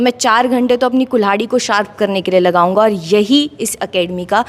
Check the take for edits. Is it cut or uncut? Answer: uncut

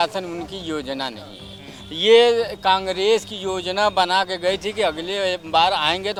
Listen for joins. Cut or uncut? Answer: uncut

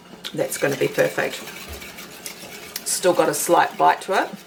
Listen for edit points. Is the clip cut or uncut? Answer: uncut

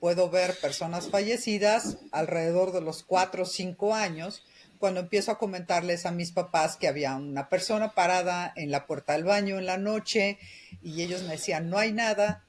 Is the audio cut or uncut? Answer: uncut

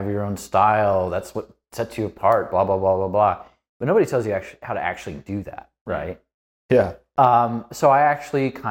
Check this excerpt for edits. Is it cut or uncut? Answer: uncut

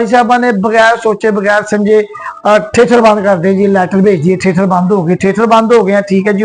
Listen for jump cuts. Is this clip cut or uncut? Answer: uncut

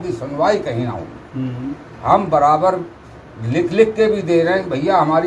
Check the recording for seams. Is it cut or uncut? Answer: uncut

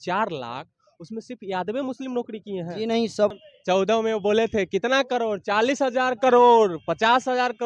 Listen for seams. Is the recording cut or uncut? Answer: cut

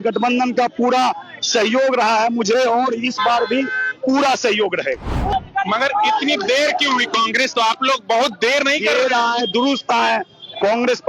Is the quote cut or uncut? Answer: cut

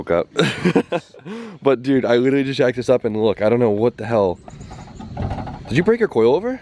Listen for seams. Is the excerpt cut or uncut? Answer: cut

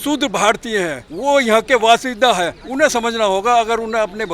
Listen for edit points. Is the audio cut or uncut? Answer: cut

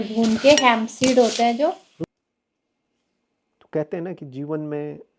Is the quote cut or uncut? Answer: cut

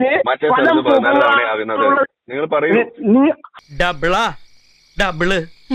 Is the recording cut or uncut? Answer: cut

